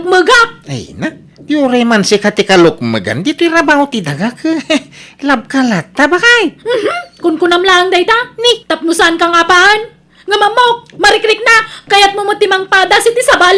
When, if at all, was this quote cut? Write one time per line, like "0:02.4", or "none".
0:11.7